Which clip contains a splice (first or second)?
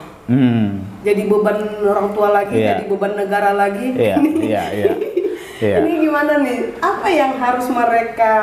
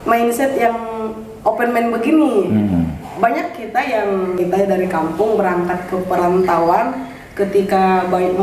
second